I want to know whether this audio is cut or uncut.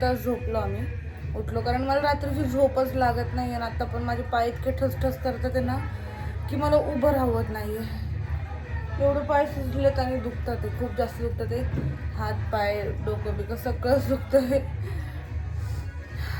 uncut